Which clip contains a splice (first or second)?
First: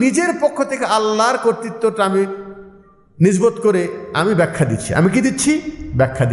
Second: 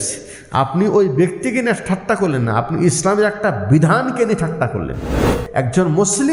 second